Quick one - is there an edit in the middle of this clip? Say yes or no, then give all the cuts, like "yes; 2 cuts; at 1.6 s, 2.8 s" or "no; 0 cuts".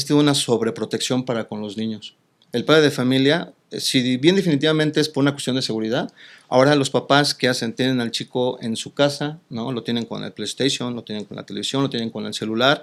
no; 0 cuts